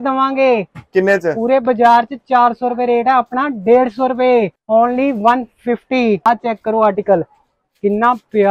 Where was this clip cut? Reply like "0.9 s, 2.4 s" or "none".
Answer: 4.6 s, 6.2 s